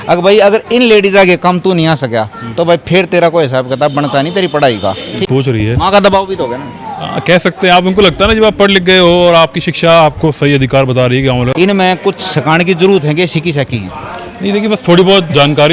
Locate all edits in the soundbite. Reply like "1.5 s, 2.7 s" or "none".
5.2 s, 11.5 s